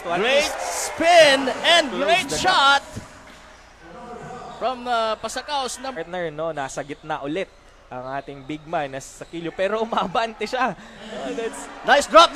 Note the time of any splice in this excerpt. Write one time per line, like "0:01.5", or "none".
0:06.0